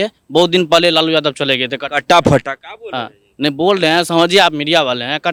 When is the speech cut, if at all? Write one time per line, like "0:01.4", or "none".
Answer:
none